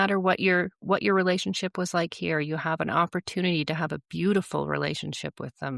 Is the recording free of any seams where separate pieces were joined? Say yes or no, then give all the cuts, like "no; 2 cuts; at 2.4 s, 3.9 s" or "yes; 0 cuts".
yes; 0 cuts